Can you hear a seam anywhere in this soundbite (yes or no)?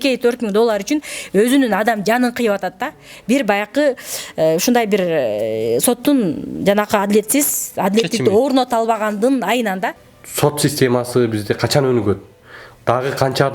yes